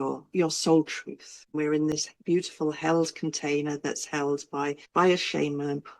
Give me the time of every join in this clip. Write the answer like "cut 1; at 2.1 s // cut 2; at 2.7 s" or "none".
cut 1; at 1.5 s // cut 2; at 4.8 s

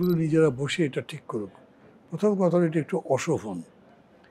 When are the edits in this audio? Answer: none

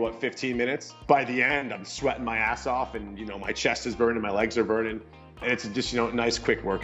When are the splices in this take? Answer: cut 1; at 1.0 s // cut 2; at 5.4 s

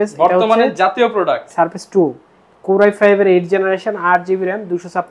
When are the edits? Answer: none

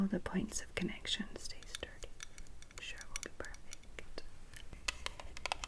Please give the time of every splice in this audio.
cut 1; at 4.8 s

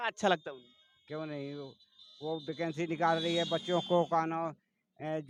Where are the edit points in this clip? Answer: none

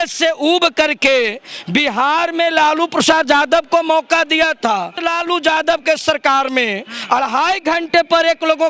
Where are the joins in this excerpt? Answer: cut 1; at 4.9 s

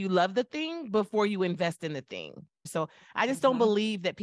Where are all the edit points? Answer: cut 1; at 2.7 s

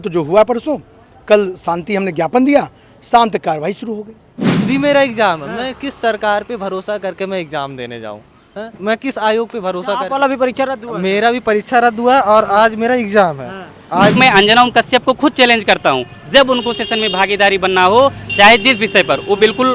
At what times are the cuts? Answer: cut 1; at 4.6 s // cut 2; at 14.2 s

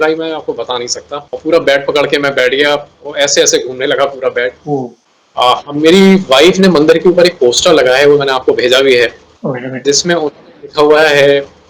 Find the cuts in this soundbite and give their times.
cut 1; at 5.0 s

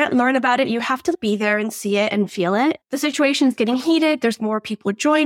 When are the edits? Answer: cut 1; at 2.8 s

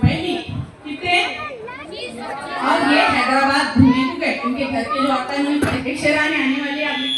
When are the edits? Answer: cut 1; at 5.8 s

